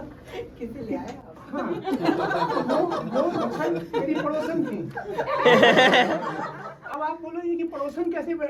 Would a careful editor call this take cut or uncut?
uncut